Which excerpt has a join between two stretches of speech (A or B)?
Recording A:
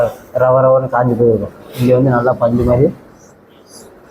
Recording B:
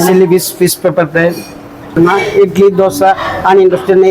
B